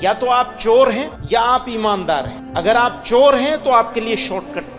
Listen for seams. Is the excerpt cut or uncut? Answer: cut